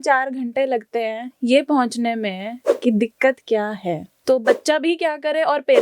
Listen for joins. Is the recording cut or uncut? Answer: cut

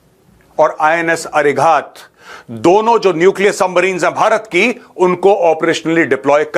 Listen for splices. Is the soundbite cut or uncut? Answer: uncut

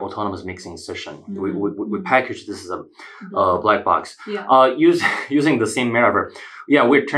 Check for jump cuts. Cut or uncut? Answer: uncut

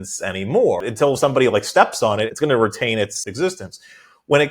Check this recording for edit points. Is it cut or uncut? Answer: cut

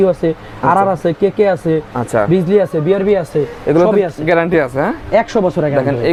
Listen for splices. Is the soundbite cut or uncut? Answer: uncut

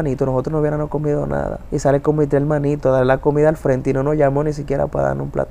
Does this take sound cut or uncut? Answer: cut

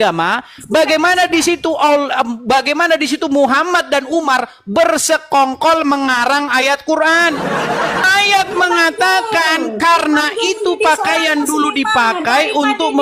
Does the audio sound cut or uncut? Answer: cut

